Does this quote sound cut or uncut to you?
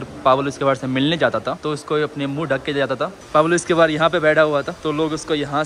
cut